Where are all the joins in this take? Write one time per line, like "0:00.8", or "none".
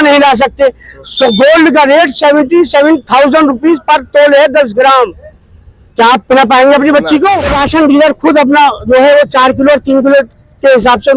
0:07.5